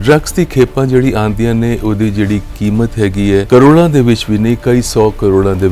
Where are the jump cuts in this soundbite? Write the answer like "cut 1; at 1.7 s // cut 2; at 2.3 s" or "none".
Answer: cut 1; at 3.5 s